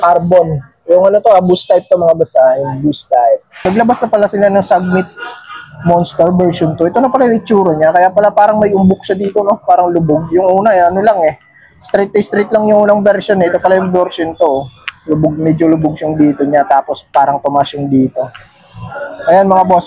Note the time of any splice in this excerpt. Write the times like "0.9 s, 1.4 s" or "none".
3.5 s